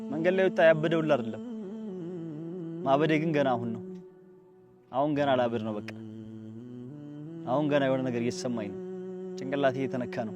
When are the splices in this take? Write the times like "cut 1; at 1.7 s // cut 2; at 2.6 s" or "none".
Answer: cut 1; at 1.3 s // cut 2; at 2.8 s